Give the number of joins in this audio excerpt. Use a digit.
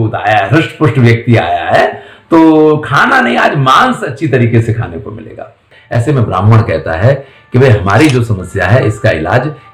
1